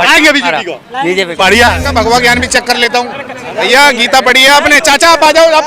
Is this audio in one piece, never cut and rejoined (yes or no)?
no